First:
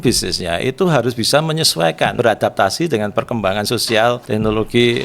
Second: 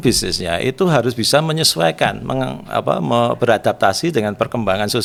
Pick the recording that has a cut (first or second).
first